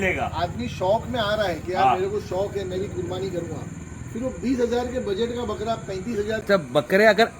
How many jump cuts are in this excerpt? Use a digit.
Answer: 1